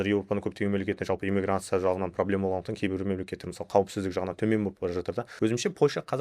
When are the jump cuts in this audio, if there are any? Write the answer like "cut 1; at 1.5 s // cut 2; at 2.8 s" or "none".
cut 1; at 5.3 s